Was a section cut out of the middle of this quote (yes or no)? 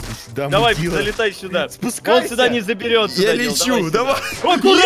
no